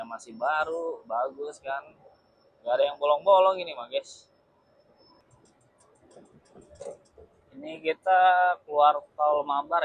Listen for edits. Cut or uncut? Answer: cut